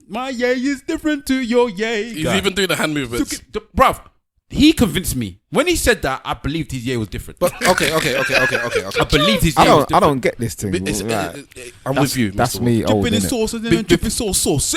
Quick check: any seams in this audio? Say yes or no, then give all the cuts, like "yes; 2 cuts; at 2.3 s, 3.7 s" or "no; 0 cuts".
no; 0 cuts